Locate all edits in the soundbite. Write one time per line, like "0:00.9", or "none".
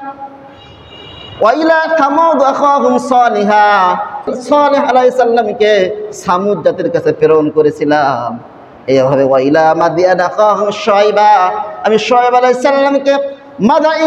0:04.3